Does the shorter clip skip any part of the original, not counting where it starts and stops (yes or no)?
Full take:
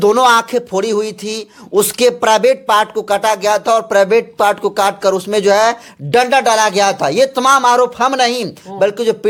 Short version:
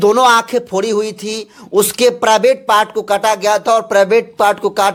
no